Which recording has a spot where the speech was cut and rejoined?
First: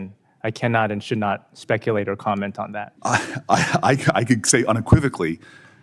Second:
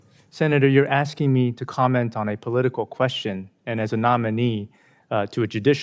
first; 1 cut; at 2.9 s

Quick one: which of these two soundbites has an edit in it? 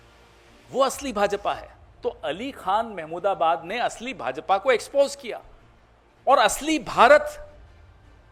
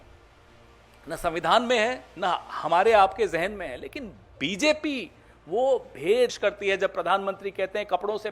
second; 1 cut; at 6.3 s

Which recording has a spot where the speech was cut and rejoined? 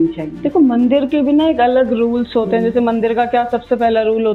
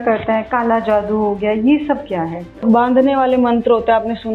second; 1 cut; at 2.6 s

